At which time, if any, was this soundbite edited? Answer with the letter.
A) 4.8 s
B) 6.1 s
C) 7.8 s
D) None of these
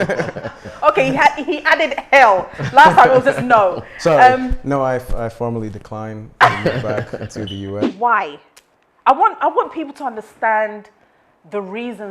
C